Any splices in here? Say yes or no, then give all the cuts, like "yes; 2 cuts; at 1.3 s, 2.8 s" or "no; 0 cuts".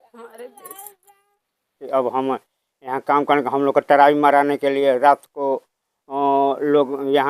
yes; 1 cut; at 1.9 s